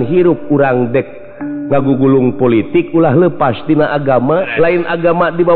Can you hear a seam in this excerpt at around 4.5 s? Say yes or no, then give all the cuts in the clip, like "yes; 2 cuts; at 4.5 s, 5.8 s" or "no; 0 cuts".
yes; 1 cut; at 4.5 s